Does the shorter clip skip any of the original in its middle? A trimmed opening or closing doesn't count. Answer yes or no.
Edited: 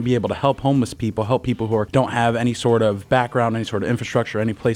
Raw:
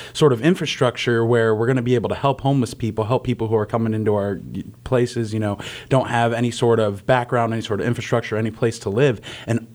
yes